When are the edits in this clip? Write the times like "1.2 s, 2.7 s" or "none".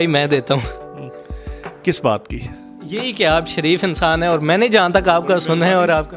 none

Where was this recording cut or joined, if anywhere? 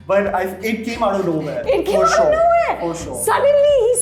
none

